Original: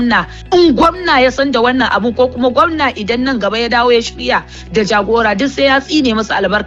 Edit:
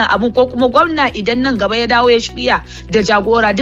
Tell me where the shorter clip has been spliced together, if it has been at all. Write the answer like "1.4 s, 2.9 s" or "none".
none